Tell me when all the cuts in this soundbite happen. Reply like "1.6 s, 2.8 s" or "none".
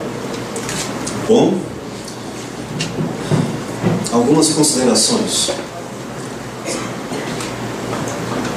none

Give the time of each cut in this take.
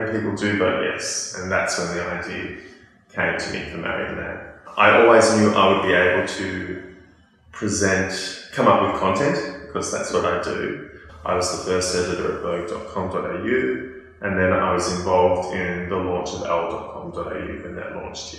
4.6 s, 11.0 s

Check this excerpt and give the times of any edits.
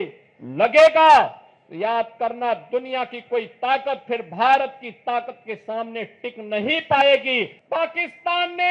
7.6 s

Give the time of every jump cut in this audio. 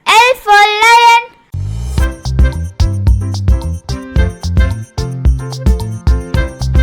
1.5 s

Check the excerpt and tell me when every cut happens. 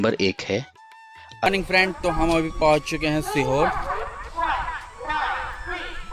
1.5 s

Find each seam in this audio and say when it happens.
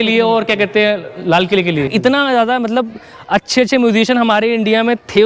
1.9 s

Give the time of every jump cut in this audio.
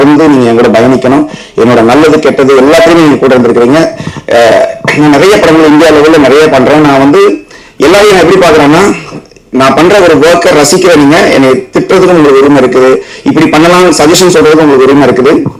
none

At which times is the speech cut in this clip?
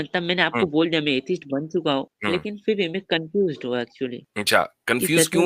2.1 s, 4.3 s

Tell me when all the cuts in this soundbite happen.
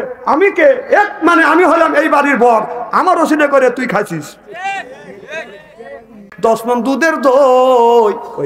6.3 s

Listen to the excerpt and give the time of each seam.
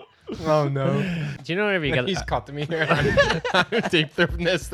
1.2 s

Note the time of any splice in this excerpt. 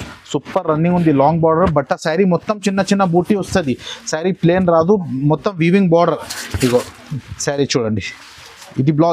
none

